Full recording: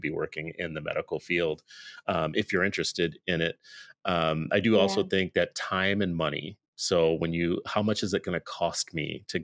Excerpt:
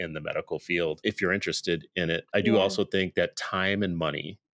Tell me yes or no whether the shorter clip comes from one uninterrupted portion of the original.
no